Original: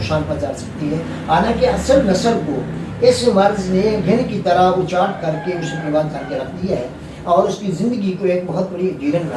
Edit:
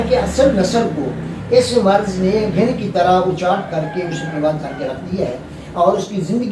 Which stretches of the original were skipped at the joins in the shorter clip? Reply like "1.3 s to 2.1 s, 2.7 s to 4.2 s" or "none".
none